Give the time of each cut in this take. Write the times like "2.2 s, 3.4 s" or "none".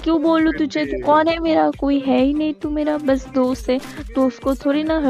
none